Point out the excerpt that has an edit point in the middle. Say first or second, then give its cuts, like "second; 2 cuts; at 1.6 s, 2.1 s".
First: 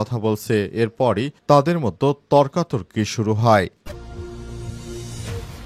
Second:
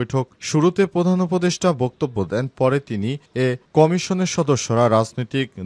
first; 1 cut; at 3.9 s